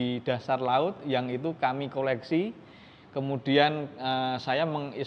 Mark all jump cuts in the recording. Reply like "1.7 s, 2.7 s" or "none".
none

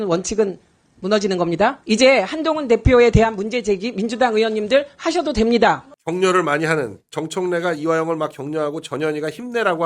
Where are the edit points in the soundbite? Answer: 1.8 s, 6.0 s

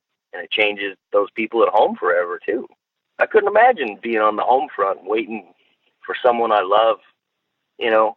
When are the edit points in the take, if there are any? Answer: none

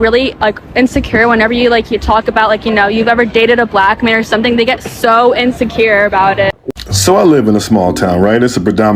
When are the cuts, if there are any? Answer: 6.6 s

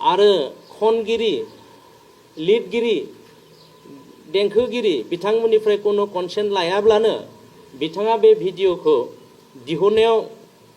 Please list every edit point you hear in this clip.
none

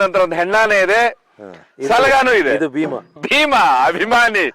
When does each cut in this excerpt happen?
3.2 s

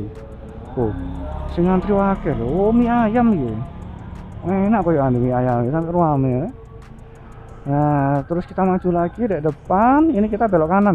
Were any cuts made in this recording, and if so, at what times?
none

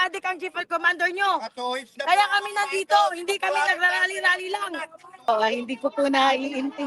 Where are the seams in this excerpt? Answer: 5.3 s

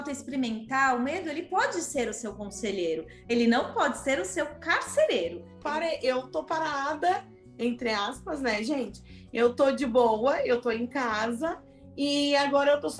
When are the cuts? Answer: 5.5 s

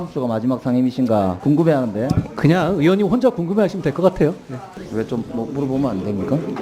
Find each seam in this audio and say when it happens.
1.4 s, 4.7 s

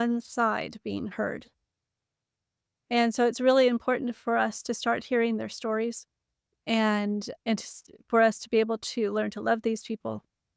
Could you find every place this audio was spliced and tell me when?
none

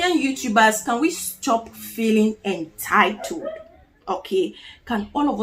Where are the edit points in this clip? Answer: none

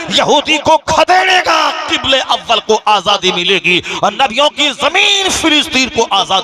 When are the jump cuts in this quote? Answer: none

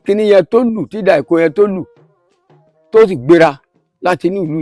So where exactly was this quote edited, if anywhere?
none

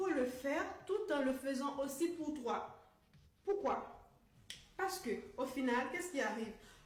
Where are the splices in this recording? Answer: none

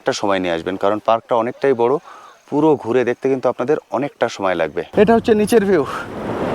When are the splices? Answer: 4.9 s

